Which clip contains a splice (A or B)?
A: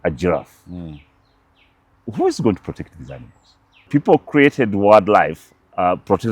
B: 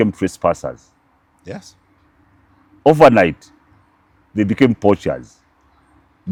A